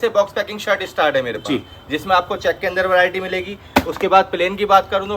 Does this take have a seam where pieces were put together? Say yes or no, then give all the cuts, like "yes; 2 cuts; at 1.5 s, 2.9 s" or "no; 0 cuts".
no; 0 cuts